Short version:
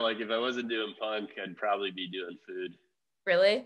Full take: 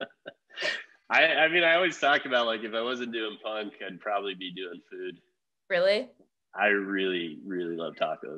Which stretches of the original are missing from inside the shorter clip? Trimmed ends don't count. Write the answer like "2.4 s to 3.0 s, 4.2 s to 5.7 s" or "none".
none